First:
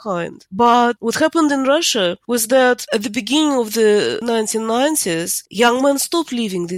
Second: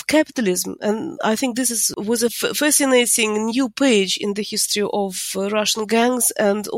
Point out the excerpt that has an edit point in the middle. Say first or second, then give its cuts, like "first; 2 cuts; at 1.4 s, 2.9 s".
first; 3 cuts; at 1.0 s, 2.2 s, 2.8 s